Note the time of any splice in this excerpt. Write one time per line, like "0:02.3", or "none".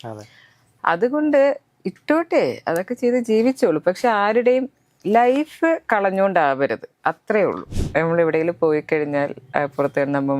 0:07.7